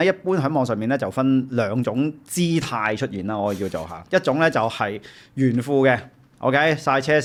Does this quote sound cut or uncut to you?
uncut